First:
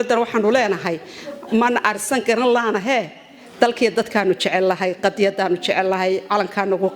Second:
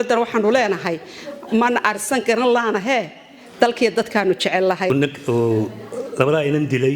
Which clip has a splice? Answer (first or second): second